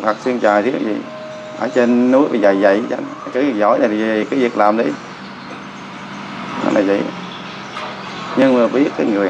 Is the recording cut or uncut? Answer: uncut